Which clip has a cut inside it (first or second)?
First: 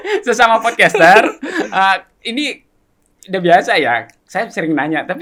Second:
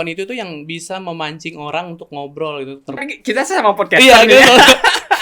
second